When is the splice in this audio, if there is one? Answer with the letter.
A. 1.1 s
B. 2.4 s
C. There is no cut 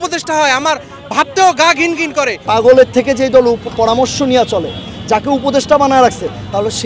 B